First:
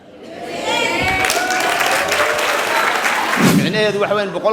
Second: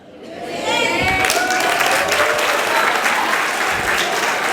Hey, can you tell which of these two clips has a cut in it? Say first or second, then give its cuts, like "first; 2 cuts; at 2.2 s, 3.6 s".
first; 1 cut; at 3.5 s